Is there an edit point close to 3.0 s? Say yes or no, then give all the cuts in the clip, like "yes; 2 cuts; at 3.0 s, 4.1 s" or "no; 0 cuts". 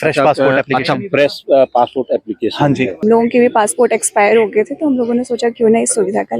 yes; 1 cut; at 3.0 s